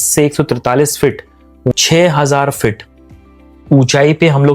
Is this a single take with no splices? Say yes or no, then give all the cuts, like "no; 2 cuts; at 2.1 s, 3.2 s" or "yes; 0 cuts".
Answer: no; 1 cut; at 1.7 s